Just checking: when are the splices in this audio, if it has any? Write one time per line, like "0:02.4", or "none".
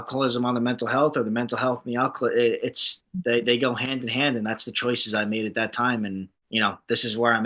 0:06.3